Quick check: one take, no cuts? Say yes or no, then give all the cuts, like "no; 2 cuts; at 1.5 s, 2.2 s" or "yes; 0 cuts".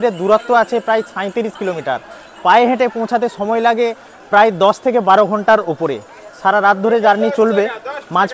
yes; 0 cuts